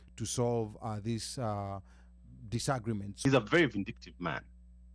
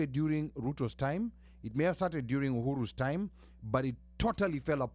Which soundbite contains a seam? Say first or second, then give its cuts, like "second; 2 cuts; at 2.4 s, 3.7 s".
first; 1 cut; at 3.2 s